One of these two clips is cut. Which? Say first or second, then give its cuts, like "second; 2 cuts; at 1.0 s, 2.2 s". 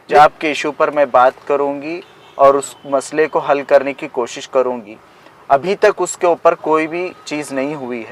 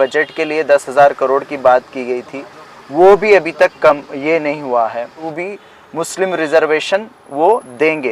second; 1 cut; at 5.3 s